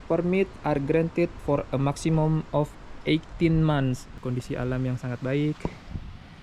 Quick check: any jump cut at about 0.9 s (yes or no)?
no